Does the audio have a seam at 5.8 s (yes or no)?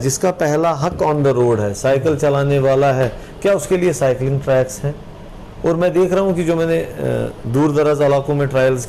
no